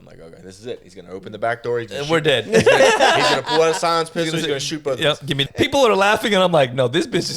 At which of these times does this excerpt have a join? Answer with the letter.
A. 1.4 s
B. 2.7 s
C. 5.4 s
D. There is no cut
C